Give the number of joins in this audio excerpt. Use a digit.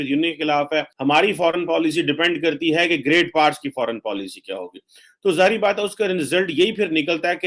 1